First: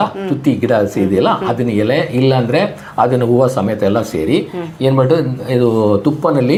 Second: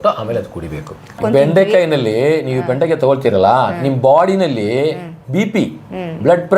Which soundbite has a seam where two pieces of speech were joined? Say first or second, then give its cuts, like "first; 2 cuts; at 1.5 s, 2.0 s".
second; 1 cut; at 1.2 s